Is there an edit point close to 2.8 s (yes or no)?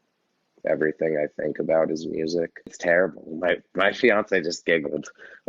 yes